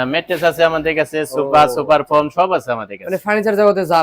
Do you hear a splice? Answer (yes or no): no